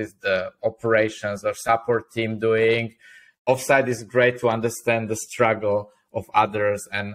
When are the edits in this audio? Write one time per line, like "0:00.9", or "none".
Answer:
0:03.3